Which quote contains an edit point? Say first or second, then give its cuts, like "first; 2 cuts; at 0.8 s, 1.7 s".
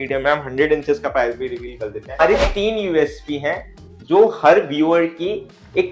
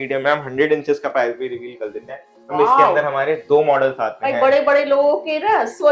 first; 1 cut; at 2.2 s